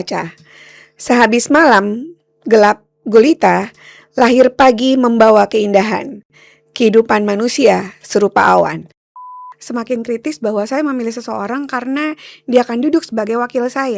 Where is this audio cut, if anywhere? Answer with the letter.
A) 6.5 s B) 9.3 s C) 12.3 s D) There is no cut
B